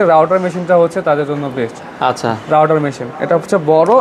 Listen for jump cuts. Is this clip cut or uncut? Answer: uncut